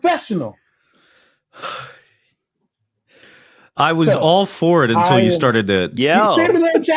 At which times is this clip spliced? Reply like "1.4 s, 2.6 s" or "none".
6.0 s